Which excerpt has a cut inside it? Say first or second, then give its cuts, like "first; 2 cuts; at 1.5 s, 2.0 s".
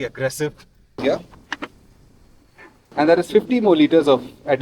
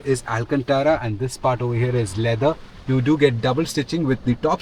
first; 1 cut; at 1.0 s